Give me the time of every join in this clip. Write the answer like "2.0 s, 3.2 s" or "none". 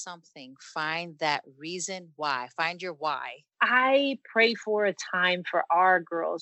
3.5 s